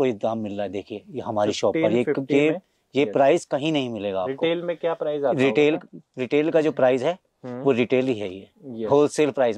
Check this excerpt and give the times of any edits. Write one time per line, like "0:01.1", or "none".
none